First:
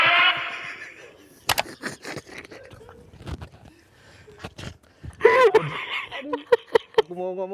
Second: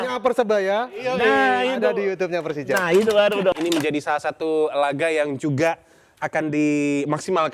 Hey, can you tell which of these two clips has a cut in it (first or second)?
second